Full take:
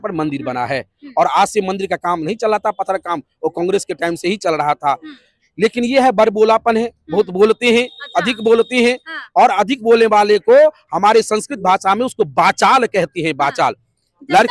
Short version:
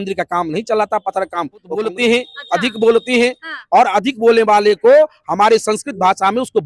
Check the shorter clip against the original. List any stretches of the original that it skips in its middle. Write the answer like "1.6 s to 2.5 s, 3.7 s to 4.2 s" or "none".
3.5 s to 7.4 s